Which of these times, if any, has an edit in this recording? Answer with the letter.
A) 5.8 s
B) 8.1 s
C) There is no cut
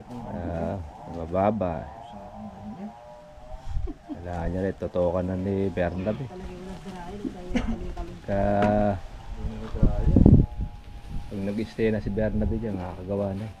C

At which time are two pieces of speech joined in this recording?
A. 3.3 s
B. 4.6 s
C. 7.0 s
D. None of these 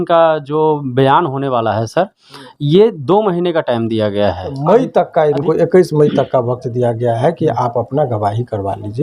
B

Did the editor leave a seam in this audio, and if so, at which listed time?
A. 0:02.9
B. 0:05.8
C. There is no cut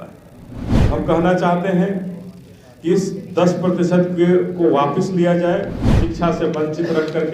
B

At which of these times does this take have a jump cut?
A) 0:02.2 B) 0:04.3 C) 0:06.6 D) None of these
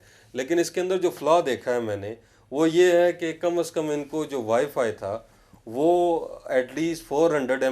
D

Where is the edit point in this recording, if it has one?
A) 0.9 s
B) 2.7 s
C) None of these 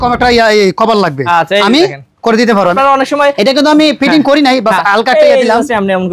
B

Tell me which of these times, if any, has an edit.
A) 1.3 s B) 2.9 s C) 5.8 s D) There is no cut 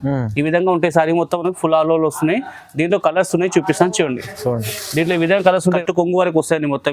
C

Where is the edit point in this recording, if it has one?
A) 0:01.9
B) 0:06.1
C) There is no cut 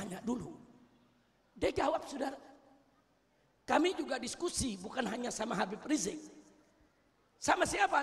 C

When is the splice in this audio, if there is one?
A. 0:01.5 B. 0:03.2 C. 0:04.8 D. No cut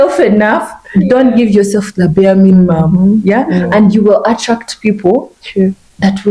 D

